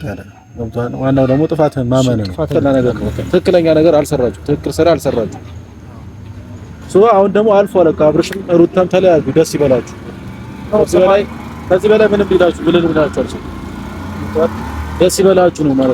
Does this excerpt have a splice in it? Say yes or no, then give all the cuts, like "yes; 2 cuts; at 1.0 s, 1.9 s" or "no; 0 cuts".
yes; 1 cut; at 2.5 s